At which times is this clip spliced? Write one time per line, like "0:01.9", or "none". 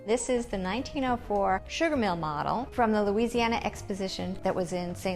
0:01.7
0:02.7
0:04.4